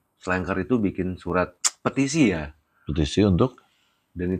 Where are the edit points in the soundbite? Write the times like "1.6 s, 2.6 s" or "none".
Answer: 1.6 s